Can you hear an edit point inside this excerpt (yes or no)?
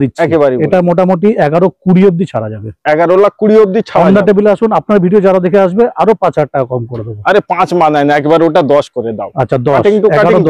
no